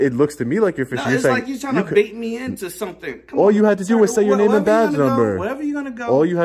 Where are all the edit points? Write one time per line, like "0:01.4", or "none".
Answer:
none